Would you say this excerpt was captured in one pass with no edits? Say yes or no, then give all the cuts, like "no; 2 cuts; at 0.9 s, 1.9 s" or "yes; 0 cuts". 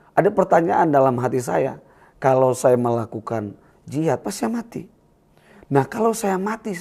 yes; 0 cuts